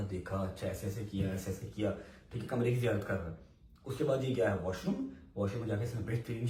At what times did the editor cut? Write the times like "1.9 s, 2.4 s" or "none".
none